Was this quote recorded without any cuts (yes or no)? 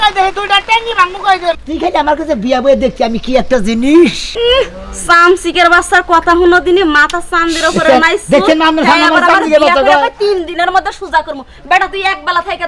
no